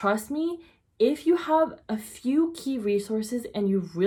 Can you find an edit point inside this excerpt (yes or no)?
no